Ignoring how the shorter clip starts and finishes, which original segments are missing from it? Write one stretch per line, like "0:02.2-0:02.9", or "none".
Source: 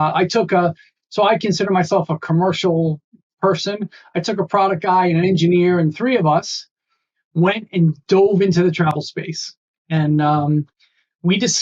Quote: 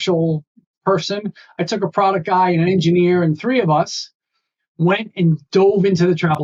none